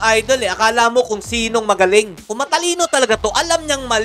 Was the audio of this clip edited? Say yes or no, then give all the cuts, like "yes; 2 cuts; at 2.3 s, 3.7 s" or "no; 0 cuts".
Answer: yes; 1 cut; at 2.2 s